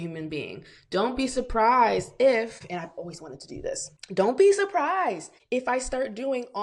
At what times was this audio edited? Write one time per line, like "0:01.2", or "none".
0:02.6
0:04.0
0:05.3